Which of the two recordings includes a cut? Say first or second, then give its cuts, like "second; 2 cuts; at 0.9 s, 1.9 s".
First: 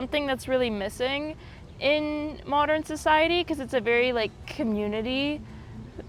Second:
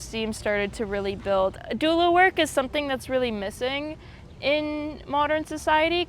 second; 1 cut; at 1.5 s